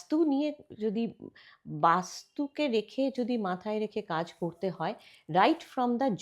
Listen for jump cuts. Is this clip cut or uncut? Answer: uncut